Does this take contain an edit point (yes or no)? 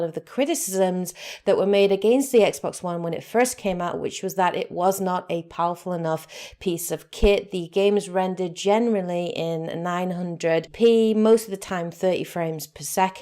yes